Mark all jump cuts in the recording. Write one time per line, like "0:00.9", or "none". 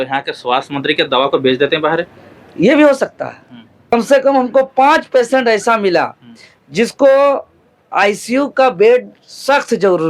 0:03.9